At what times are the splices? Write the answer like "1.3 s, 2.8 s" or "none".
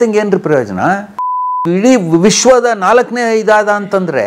none